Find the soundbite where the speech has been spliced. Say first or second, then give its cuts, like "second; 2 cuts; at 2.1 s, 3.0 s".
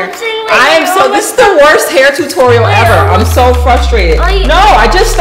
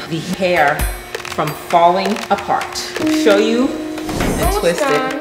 second; 1 cut; at 4.2 s